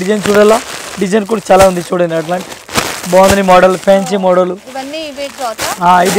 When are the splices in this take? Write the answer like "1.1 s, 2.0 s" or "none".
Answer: none